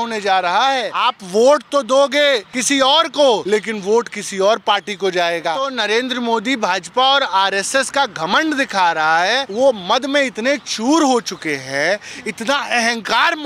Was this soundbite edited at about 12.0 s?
no; 5 cuts; at 0.9 s, 2.5 s, 3.4 s, 5.7 s, 9.5 s

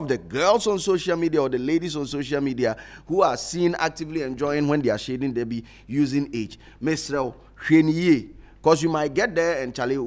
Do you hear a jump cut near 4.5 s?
no; 0 cuts

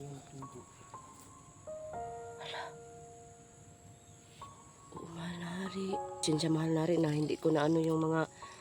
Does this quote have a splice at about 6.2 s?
yes; 1 cut; at 6.2 s

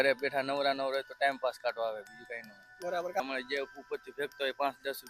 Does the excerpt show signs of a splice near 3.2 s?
yes; 1 cut; at 3.2 s

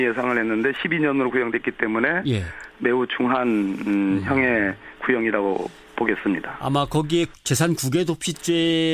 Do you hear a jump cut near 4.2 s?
yes; 1 cut; at 4.2 s

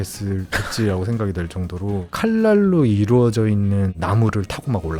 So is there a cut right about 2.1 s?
yes; 1 cut; at 2.1 s

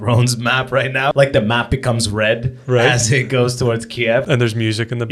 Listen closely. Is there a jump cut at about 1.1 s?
yes; 2 cuts; at 1.1 s, 4.2 s

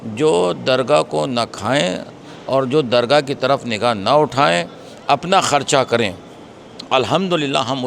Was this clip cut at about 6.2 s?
no; 0 cuts

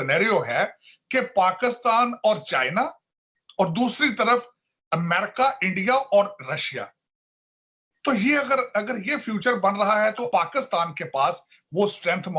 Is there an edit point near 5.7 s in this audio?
no; 1 cut; at 10.2 s

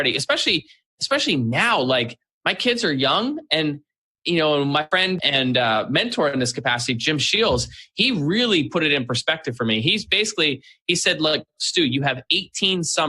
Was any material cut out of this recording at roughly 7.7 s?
no; 1 cut; at 5.0 s

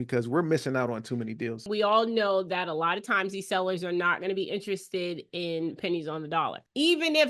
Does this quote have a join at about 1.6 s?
yes; 1 cut; at 1.6 s

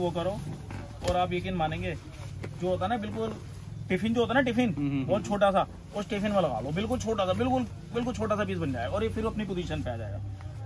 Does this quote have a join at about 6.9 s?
no; 0 cuts

